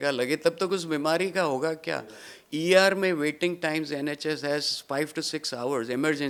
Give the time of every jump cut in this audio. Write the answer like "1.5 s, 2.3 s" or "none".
none